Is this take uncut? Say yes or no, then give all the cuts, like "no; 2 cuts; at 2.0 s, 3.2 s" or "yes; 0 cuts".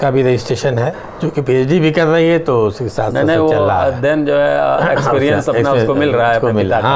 yes; 0 cuts